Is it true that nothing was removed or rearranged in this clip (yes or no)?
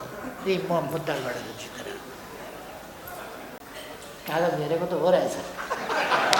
yes